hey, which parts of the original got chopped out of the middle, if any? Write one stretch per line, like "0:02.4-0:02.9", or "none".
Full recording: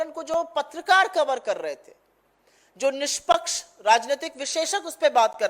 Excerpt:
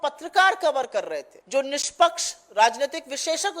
0:01.9-0:02.6